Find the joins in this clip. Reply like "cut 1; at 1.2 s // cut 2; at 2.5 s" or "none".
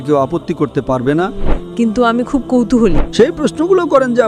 cut 1; at 1.6 s // cut 2; at 3.0 s